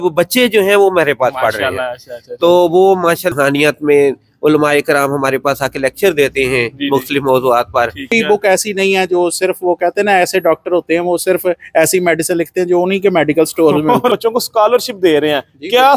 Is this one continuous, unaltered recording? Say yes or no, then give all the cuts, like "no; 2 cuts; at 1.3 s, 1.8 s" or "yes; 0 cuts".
no; 3 cuts; at 3.3 s, 8.1 s, 14.2 s